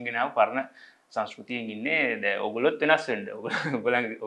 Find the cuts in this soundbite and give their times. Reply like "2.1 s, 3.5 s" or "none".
none